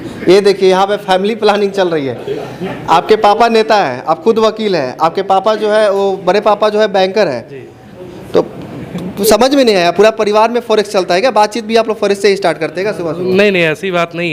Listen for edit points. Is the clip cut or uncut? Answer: uncut